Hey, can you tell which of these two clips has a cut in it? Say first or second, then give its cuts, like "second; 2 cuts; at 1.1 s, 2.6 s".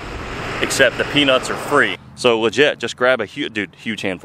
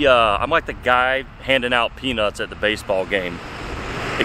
first; 1 cut; at 2.0 s